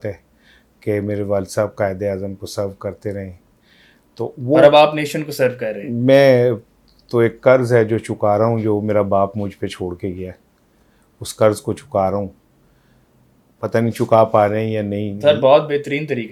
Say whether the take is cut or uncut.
uncut